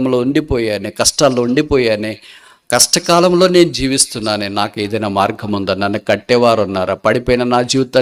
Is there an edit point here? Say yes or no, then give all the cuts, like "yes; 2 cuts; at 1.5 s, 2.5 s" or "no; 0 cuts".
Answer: no; 0 cuts